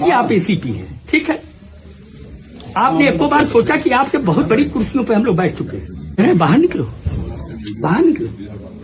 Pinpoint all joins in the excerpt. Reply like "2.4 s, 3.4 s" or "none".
6.2 s